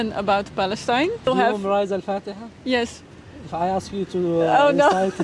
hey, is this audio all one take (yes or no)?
no